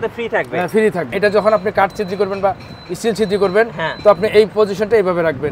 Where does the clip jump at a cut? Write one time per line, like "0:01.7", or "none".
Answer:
0:01.2